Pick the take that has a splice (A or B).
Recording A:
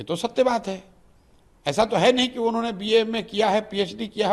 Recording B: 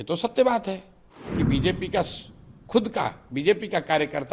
B